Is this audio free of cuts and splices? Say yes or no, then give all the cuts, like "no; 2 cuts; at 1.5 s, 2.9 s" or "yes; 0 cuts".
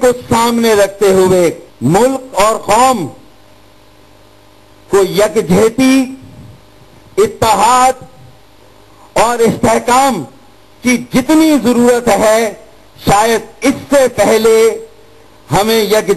no; 1 cut; at 1.7 s